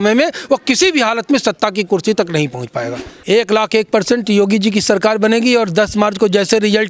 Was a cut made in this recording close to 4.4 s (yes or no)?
no